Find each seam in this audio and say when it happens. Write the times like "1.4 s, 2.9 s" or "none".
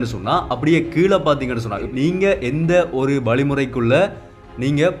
1.9 s